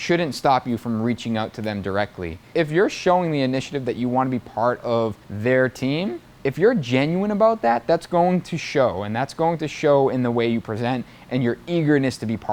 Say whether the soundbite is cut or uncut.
cut